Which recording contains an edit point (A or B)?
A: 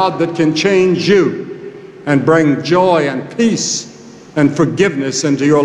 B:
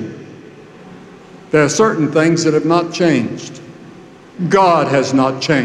B